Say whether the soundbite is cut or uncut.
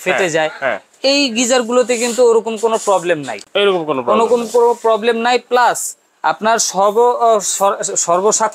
uncut